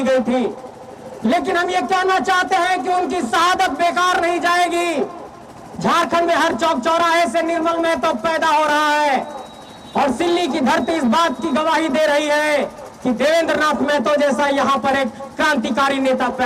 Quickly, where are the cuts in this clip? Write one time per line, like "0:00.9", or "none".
none